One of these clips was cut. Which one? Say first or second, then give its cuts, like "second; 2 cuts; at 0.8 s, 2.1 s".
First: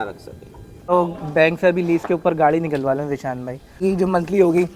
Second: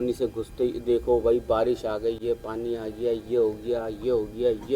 first; 2 cuts; at 0.9 s, 3.8 s